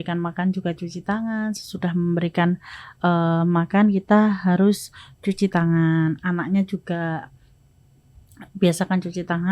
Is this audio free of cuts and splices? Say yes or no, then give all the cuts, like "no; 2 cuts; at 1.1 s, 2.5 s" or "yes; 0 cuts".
yes; 0 cuts